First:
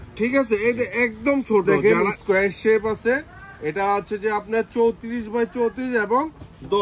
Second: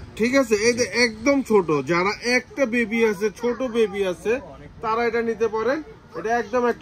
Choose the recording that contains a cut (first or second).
first